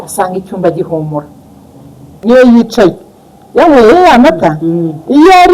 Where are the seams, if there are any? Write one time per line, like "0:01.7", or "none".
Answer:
0:02.1